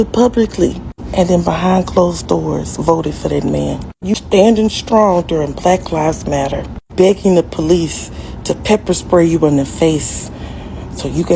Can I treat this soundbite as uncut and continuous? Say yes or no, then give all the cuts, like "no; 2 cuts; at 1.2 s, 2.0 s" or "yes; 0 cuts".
yes; 0 cuts